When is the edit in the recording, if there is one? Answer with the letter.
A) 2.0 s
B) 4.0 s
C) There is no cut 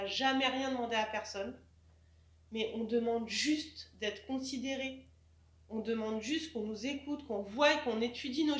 C